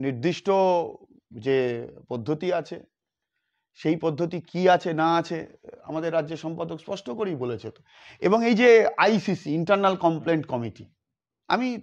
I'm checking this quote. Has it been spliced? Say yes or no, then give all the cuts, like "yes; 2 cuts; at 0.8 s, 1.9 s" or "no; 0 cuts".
no; 0 cuts